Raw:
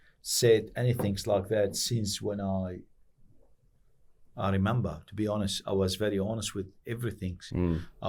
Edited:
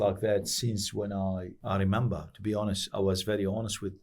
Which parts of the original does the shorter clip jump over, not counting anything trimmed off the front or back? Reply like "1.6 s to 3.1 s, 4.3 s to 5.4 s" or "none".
2.8 s to 4.3 s